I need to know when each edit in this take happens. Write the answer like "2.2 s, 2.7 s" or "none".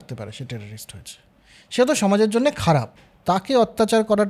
3.0 s